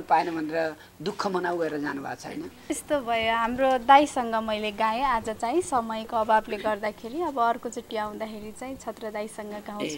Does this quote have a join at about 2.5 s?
yes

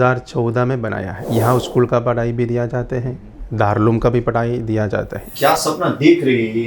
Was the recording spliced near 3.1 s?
no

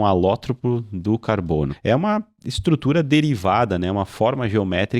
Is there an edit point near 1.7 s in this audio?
yes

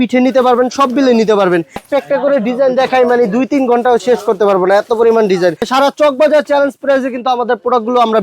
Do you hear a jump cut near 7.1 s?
no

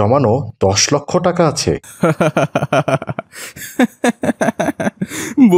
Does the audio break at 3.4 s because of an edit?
no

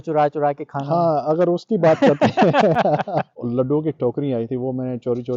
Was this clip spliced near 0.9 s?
no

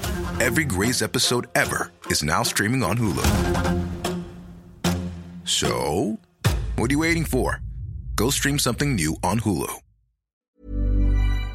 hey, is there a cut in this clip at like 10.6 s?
yes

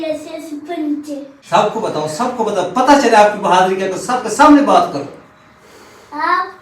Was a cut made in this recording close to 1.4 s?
yes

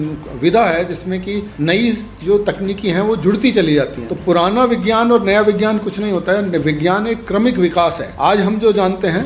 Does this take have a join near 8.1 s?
yes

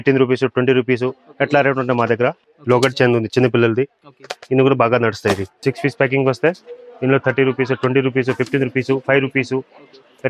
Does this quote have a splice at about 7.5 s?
no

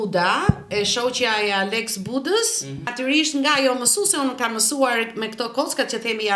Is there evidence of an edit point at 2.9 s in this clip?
yes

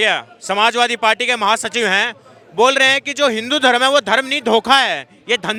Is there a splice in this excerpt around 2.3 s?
no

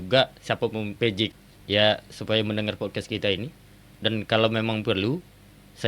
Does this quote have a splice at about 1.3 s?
yes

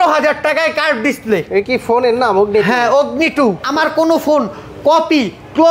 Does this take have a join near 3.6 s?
yes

